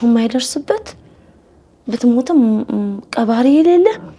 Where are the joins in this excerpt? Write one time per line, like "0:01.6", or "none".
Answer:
none